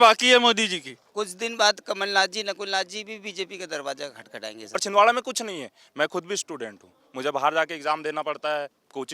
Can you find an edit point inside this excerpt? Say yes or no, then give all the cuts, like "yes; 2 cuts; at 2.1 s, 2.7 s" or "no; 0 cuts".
yes; 2 cuts; at 1.0 s, 4.8 s